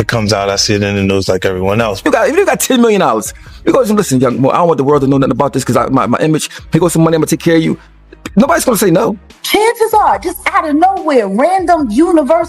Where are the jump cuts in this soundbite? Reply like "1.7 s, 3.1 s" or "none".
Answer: 2.0 s, 9.4 s